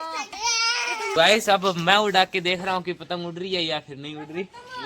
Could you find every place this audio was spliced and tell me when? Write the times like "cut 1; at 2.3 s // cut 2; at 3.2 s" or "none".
cut 1; at 1.2 s